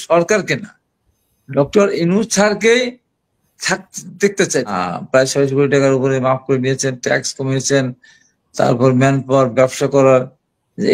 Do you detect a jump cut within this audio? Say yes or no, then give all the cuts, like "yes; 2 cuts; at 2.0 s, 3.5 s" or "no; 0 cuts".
yes; 1 cut; at 4.8 s